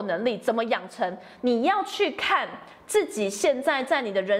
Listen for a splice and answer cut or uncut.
uncut